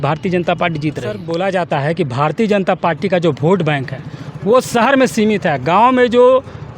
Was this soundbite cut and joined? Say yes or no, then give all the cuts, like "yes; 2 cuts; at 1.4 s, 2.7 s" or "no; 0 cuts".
yes; 1 cut; at 1.2 s